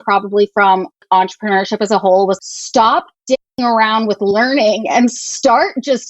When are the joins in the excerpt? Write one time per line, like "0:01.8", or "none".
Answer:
0:01.0
0:02.4